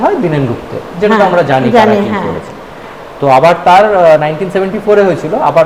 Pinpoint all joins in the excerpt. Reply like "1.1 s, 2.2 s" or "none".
none